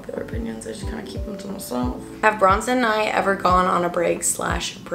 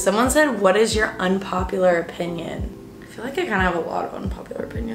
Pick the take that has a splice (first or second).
first